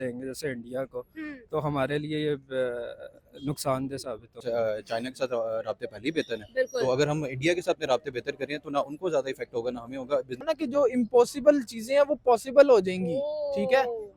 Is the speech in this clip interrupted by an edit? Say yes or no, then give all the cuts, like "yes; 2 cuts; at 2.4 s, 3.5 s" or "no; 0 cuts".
yes; 2 cuts; at 4.4 s, 10.5 s